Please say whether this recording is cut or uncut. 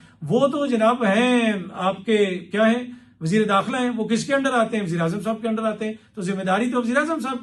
uncut